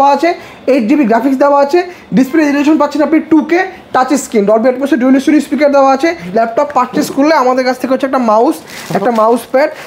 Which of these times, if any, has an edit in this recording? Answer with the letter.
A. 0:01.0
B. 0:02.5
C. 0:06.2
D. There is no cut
C